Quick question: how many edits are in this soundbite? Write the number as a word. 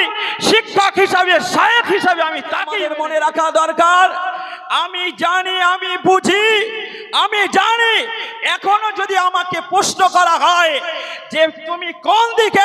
one